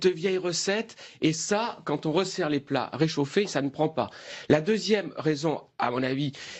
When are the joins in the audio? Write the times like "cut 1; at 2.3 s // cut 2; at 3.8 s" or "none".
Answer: cut 1; at 2.3 s